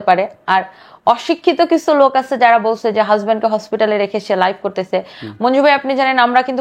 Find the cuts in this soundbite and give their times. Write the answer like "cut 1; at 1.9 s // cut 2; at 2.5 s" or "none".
none